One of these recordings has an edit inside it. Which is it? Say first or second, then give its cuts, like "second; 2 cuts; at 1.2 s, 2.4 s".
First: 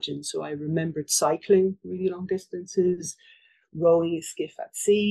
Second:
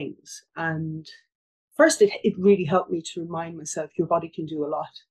second; 1 cut; at 1.3 s